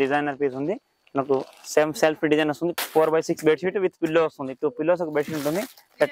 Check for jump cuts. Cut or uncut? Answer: cut